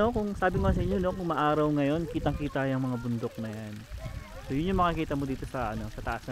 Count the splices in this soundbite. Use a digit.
0